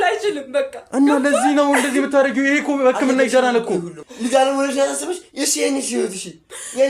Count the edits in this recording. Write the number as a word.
one